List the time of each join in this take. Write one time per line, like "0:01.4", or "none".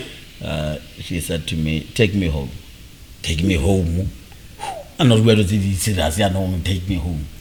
none